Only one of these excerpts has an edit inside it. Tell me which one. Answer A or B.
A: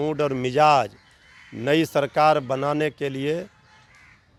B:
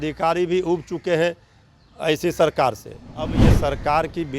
B